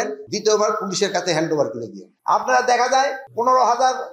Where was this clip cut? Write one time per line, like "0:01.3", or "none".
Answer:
0:02.1